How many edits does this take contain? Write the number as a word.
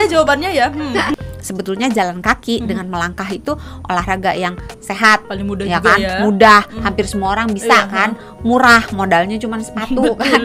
one